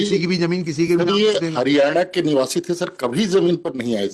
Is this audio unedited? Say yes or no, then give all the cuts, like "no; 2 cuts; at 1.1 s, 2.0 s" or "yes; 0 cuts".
yes; 0 cuts